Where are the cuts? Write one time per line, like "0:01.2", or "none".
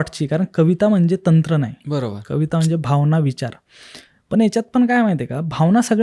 none